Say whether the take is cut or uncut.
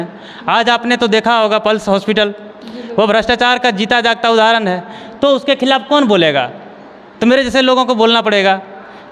uncut